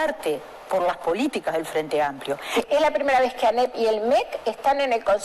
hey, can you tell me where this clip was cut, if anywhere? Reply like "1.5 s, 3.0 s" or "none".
2.5 s